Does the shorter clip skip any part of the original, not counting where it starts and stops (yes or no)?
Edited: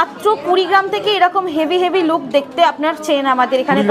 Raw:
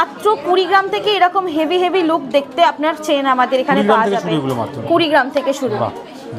no